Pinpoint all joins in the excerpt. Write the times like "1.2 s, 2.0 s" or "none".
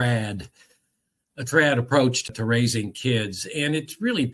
2.3 s